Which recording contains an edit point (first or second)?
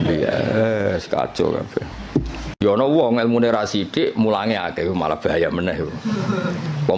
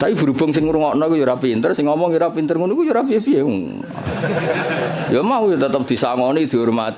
first